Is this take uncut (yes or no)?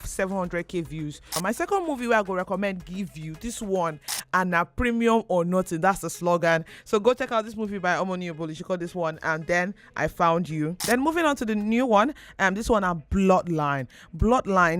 no